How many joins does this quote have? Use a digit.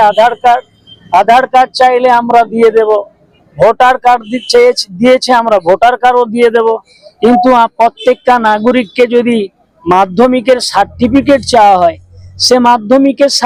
0